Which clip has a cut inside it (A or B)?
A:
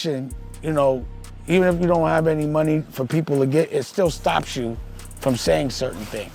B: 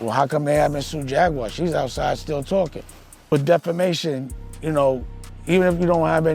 B